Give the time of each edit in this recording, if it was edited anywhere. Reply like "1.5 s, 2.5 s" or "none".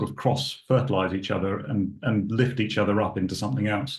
none